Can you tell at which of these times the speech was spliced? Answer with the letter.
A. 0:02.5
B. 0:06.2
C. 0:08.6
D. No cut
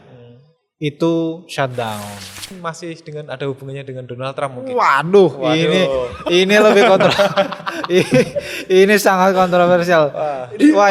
A